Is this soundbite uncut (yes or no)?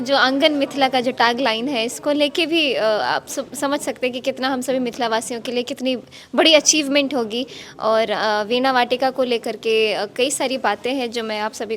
yes